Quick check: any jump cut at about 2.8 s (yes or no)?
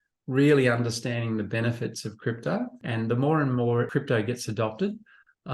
yes